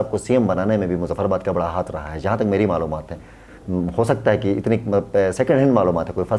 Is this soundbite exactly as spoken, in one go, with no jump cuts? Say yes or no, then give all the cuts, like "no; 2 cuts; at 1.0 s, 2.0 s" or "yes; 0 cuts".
yes; 0 cuts